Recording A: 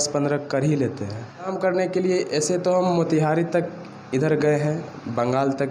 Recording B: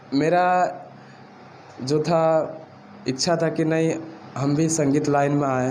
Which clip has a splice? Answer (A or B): A